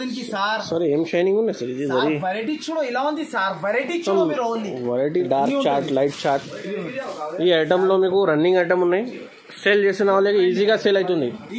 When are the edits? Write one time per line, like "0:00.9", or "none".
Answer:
0:05.3

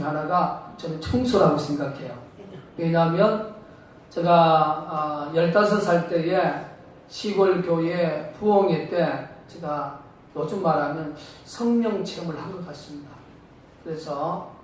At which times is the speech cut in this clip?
0:05.0

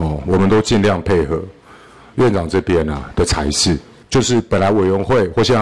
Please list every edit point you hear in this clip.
0:03.9

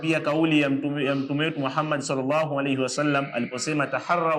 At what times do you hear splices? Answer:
none

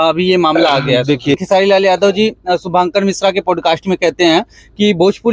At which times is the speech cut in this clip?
0:01.4

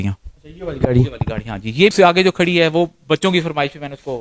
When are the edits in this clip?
0:01.9

